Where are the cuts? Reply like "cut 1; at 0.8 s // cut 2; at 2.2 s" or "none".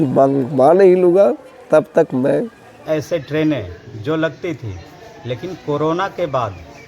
cut 1; at 2.8 s